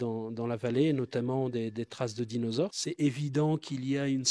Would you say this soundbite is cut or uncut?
cut